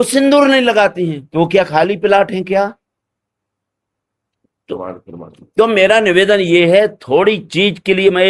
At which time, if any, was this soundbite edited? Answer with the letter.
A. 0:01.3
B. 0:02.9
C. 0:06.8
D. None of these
D